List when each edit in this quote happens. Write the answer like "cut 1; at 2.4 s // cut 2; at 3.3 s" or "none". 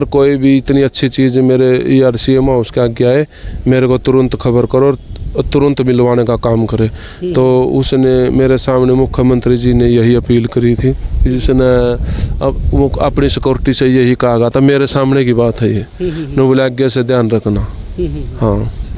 none